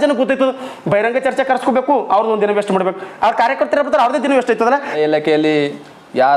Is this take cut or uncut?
cut